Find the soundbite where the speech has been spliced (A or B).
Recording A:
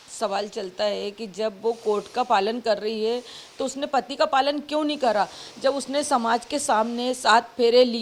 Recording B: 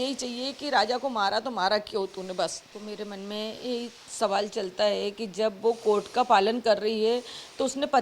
B